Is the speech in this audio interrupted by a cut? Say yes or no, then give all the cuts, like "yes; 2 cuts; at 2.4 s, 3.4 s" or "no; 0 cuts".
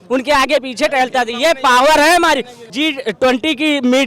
yes; 1 cut; at 2.6 s